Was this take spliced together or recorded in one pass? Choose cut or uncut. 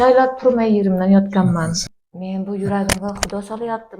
cut